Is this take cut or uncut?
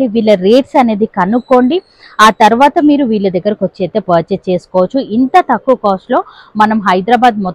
uncut